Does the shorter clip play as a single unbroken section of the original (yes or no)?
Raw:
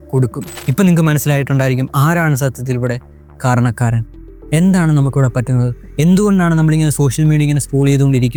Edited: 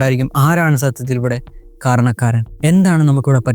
no